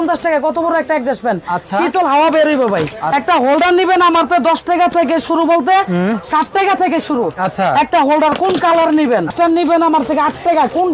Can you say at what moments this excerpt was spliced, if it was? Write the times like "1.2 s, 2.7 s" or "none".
3.0 s, 9.3 s